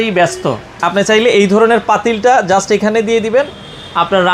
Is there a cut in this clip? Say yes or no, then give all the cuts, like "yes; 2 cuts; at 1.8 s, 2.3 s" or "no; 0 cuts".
no; 0 cuts